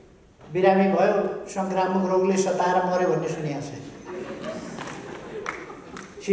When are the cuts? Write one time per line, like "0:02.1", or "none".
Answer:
none